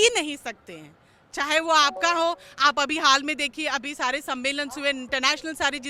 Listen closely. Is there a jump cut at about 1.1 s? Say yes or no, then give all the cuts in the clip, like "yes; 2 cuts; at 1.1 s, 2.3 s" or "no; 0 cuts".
no; 0 cuts